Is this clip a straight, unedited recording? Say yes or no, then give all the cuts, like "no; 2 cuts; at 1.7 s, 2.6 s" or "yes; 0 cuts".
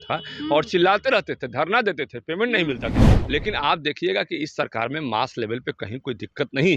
no; 1 cut; at 3.0 s